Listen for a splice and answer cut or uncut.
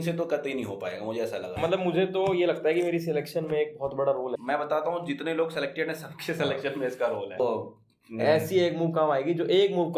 cut